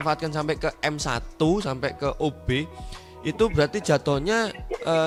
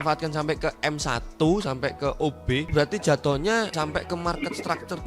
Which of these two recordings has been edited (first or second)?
second